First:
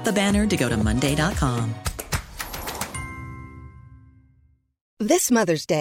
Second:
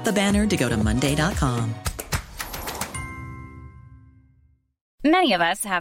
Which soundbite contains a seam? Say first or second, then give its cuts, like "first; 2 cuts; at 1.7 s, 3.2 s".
second; 1 cut; at 4.8 s